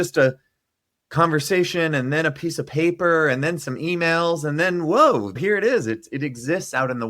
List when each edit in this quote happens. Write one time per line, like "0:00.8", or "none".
0:05.4